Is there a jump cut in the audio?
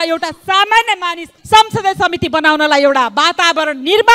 yes; 1 cut; at 1.3 s

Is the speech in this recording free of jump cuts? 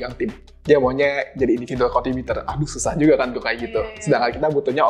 yes; 0 cuts

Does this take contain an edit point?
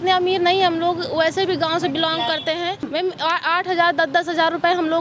yes; 1 cut; at 2.9 s

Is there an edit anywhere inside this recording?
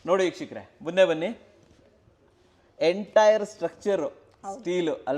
no; 0 cuts

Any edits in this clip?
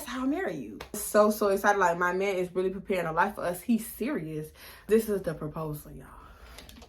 yes; 2 cuts; at 1.0 s, 4.8 s

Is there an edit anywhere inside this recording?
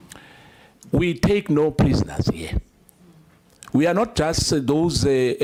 no; 0 cuts

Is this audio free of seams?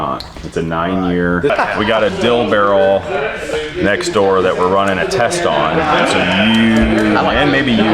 no; 1 cut; at 1.5 s

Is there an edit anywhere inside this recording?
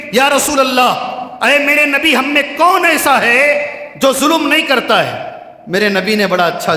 no; 0 cuts

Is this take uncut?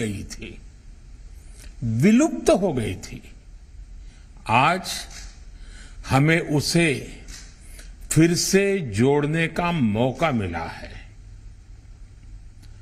yes; 0 cuts

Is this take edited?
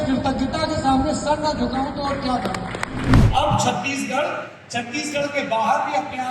yes; 1 cut; at 3.2 s

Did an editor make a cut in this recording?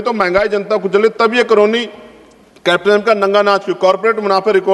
no; 0 cuts

